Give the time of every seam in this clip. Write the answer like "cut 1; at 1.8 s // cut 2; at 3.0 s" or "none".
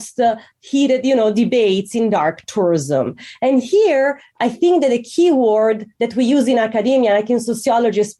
none